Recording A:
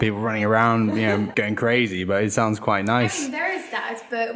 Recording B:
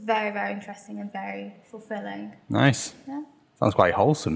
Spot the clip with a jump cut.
A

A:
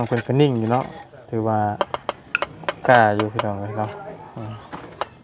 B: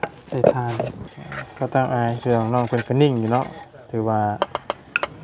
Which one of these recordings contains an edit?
B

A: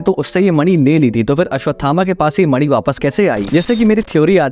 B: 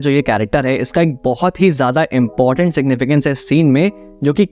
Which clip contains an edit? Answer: A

